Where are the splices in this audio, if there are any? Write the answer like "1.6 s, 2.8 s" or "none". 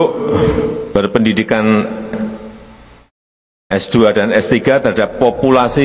none